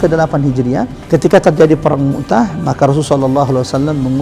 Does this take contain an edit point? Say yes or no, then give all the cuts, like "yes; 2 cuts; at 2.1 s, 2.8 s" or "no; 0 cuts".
yes; 1 cut; at 1.0 s